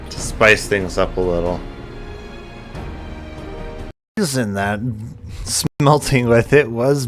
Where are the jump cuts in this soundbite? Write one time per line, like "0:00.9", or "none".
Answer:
0:04.0
0:05.7